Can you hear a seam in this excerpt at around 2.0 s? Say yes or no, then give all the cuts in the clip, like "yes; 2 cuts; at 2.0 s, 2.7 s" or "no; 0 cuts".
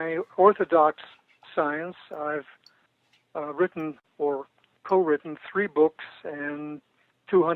yes; 1 cut; at 2.0 s